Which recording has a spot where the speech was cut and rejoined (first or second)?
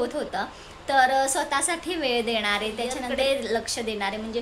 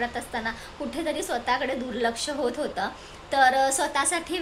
first